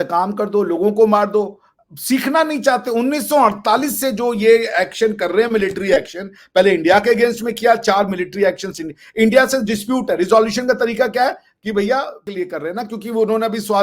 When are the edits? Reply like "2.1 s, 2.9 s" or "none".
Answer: 12.2 s